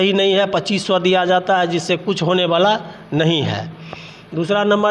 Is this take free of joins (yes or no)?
yes